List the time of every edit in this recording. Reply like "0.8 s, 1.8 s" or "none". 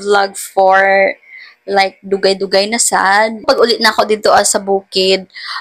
3.4 s